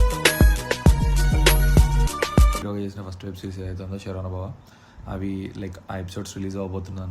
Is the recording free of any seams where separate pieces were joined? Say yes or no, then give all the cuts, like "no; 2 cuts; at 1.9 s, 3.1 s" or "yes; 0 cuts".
no; 1 cut; at 2.6 s